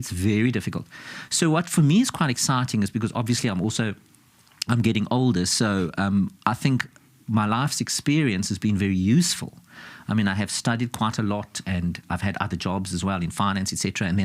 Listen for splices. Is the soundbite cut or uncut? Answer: uncut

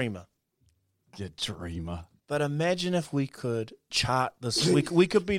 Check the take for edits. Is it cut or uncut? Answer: cut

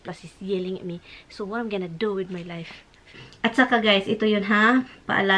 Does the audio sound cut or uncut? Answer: cut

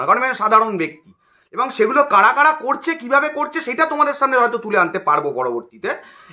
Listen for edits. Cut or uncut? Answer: uncut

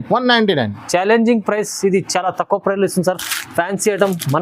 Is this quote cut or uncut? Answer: uncut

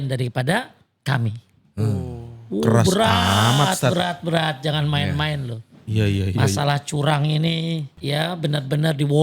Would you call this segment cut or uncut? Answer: cut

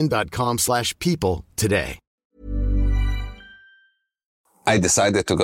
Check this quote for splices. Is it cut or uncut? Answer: cut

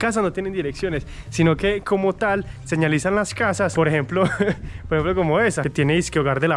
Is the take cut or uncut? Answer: uncut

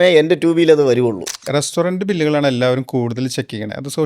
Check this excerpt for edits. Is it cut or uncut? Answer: cut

